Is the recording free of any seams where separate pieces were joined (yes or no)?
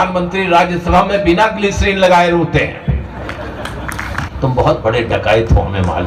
no